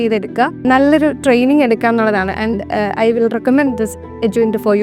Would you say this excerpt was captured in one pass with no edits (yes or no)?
yes